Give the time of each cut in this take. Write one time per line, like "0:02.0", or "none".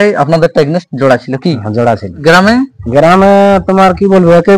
0:02.1